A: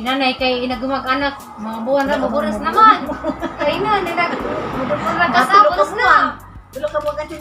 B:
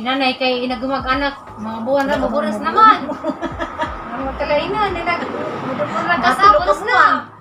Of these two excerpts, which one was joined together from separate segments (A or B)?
A